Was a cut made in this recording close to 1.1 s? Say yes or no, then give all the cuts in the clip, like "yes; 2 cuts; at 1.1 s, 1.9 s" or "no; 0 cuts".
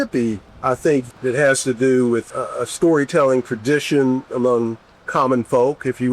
yes; 1 cut; at 1.1 s